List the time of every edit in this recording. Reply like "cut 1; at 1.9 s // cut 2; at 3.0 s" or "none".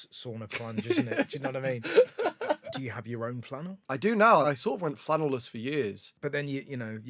cut 1; at 2.8 s // cut 2; at 3.8 s // cut 3; at 4.4 s // cut 4; at 6.1 s